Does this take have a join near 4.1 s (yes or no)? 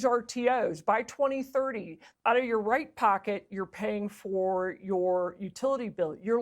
no